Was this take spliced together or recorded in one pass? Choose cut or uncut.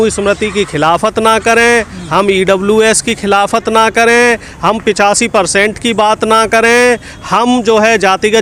uncut